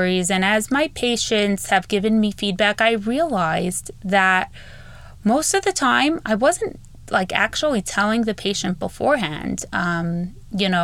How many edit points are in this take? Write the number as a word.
zero